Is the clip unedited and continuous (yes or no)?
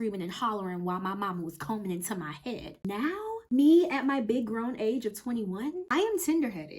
no